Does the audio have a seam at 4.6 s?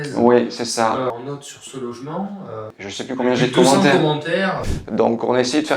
yes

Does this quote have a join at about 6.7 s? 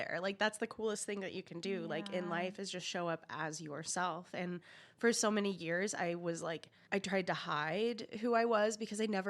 yes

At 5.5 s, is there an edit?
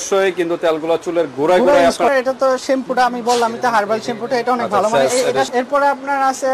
yes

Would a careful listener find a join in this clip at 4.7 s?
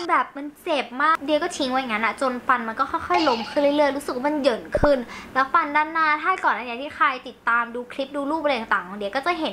no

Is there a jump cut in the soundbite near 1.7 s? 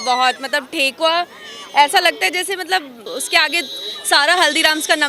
no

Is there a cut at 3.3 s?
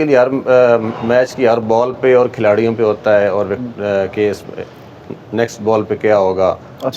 no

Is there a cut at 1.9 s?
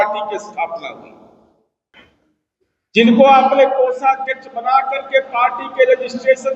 yes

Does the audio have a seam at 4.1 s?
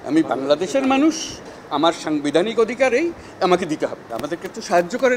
yes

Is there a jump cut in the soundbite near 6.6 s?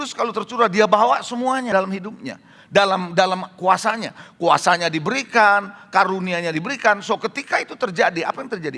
no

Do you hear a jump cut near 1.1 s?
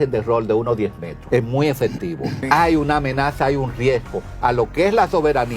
yes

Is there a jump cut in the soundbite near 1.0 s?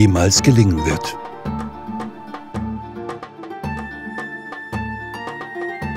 yes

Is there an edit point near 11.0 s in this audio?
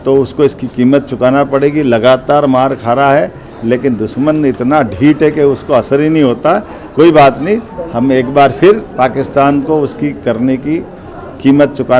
no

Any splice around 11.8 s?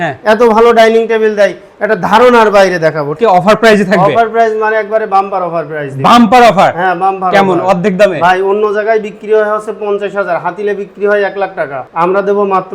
yes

